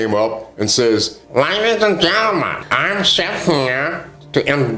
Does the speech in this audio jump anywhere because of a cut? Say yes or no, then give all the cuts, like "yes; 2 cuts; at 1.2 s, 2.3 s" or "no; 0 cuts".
yes; 2 cuts; at 1.2 s, 2.6 s